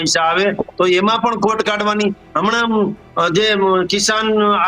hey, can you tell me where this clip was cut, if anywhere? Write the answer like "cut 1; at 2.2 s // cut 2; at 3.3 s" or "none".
none